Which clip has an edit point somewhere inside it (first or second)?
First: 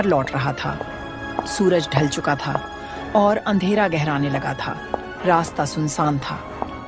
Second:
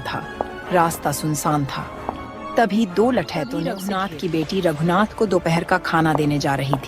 second